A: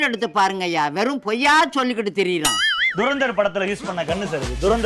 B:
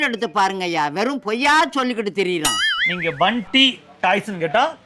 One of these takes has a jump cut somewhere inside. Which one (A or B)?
A